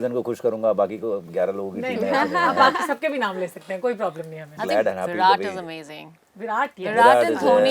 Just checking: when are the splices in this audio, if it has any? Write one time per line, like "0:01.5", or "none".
0:04.6